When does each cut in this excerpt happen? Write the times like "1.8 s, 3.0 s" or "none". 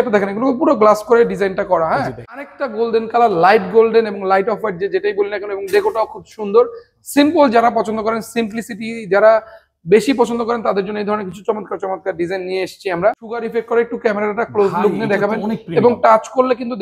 2.5 s, 13.5 s